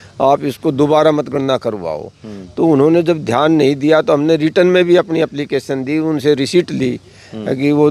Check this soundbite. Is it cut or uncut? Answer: uncut